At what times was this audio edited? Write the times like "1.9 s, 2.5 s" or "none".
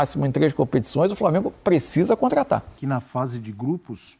2.7 s